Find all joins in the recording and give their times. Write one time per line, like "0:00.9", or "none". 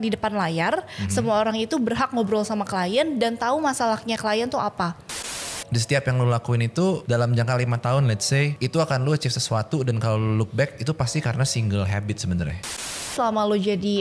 0:05.2
0:07.0
0:08.5
0:13.2